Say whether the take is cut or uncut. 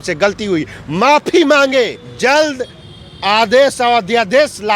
cut